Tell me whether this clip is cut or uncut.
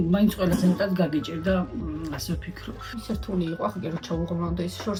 uncut